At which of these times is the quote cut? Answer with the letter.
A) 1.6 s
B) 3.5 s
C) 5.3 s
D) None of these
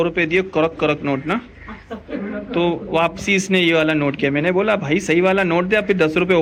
D